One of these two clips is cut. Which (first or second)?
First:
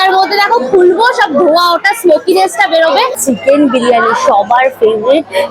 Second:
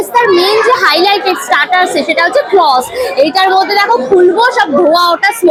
first